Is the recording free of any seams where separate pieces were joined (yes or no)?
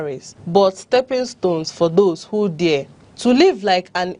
yes